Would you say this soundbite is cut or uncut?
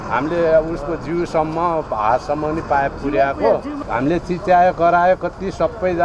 cut